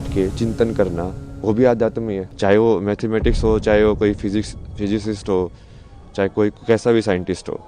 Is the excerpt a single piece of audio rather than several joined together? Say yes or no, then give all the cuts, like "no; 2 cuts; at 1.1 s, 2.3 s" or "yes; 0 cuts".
no; 1 cut; at 2.2 s